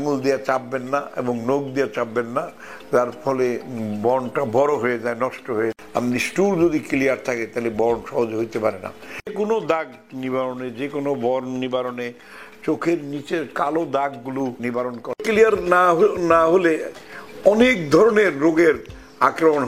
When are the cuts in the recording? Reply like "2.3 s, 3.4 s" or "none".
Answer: 5.8 s, 9.3 s, 15.2 s